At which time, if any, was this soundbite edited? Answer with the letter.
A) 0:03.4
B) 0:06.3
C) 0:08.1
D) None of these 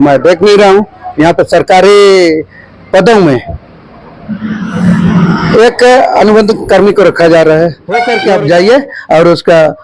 C